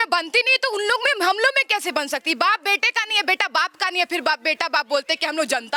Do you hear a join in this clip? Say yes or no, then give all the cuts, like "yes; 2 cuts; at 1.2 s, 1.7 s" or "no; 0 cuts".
no; 0 cuts